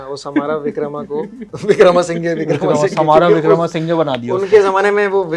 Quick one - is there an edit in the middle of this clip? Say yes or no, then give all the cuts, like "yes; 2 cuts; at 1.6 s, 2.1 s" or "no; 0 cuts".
no; 0 cuts